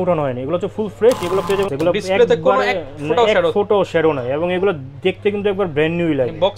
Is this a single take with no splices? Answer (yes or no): no